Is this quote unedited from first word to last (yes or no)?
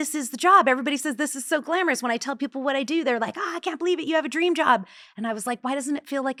yes